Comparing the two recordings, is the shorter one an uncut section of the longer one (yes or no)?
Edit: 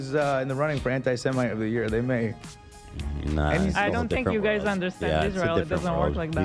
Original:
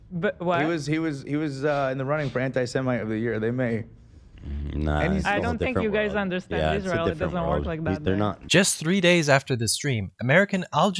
yes